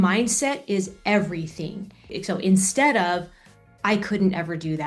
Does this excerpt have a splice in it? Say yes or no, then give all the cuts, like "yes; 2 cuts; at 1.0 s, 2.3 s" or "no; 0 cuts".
yes; 1 cut; at 2.1 s